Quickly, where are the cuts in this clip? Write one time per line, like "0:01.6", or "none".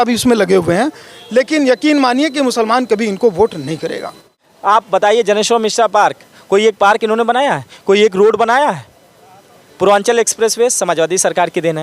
0:04.7